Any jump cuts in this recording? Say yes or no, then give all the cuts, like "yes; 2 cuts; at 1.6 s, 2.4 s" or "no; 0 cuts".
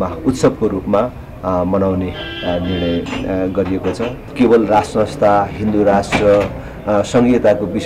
yes; 1 cut; at 4.2 s